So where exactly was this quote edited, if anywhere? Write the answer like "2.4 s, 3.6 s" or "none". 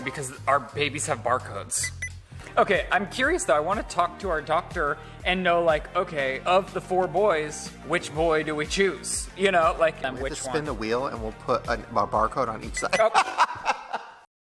2.3 s, 10.0 s